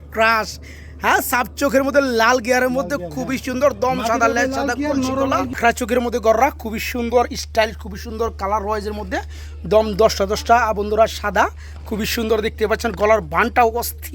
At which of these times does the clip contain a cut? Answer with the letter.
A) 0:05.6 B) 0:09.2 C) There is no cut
A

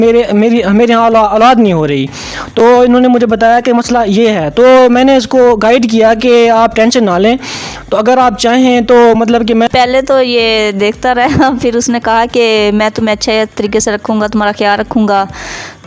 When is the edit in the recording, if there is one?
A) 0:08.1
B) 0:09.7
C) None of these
B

